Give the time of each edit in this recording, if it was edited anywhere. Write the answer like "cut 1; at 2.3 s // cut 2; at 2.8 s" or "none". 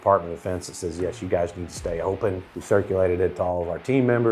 cut 1; at 2.5 s